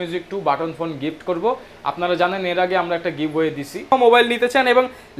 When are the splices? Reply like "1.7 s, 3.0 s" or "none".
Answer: 3.9 s

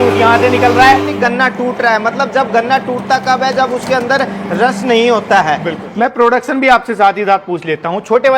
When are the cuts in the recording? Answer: 1.1 s, 5.8 s

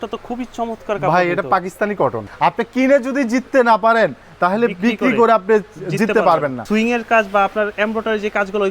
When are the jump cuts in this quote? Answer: 2.2 s, 6.6 s

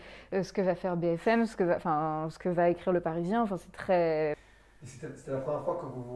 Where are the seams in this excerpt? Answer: 4.5 s

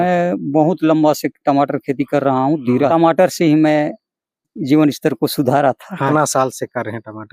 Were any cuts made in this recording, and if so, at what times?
2.9 s, 4.5 s, 6.1 s

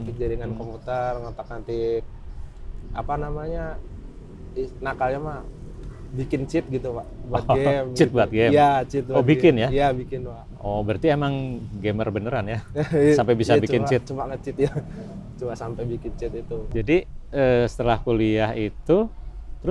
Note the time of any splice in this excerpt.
16.7 s

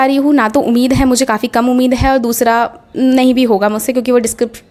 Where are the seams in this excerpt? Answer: none

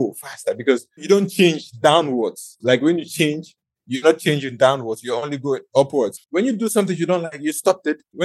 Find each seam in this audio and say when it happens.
6.2 s

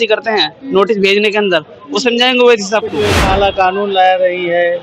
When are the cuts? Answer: 3.1 s

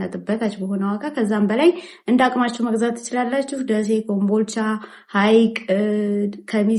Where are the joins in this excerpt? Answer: none

